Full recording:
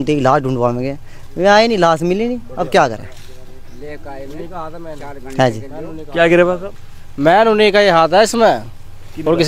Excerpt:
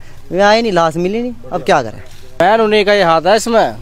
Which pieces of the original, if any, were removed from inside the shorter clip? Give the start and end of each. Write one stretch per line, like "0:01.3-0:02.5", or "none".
0:03.4-0:07.3